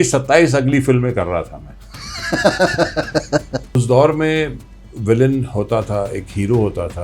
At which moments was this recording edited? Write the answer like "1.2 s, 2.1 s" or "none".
3.8 s